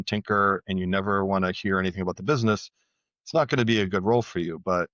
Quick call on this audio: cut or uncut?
uncut